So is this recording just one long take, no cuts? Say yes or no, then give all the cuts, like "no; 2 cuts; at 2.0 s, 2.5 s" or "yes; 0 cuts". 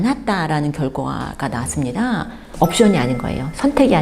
no; 1 cut; at 2.4 s